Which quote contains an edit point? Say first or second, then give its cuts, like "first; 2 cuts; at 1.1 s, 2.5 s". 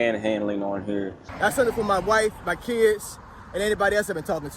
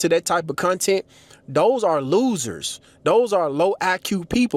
first; 1 cut; at 1.2 s